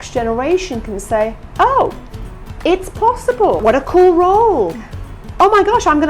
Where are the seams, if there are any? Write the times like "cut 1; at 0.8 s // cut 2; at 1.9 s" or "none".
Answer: cut 1; at 3.6 s